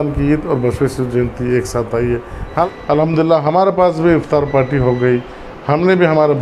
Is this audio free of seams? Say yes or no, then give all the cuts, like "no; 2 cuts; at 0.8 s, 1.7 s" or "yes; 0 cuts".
no; 1 cut; at 2.7 s